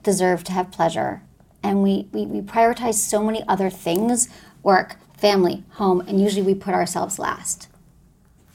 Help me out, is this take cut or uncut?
uncut